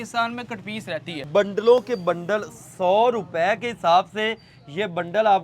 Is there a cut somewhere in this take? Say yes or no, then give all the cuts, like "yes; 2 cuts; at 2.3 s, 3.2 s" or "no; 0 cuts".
yes; 1 cut; at 1.2 s